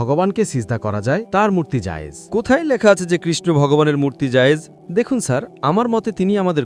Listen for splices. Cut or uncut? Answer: cut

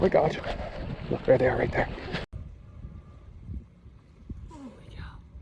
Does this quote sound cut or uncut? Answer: cut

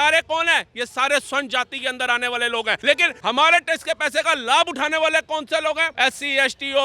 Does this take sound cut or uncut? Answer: cut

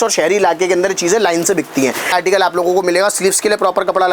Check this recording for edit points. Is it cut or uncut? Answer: cut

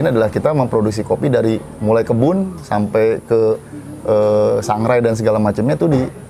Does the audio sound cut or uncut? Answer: uncut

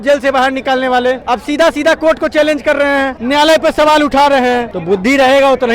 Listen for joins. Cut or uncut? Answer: cut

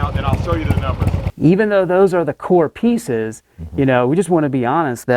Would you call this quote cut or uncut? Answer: cut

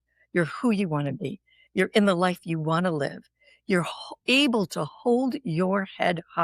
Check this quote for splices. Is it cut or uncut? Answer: uncut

